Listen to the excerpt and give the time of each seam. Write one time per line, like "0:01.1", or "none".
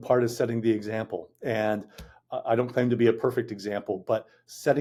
none